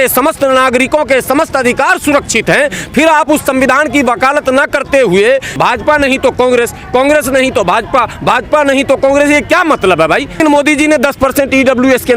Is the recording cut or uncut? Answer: cut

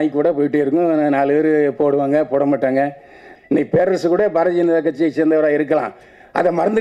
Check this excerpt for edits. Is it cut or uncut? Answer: cut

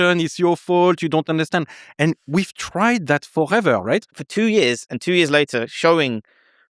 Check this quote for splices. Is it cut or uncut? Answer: uncut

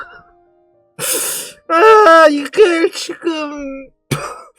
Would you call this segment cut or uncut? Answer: uncut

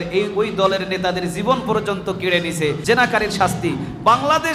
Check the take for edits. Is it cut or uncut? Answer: cut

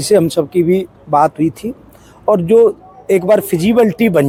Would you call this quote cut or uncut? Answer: uncut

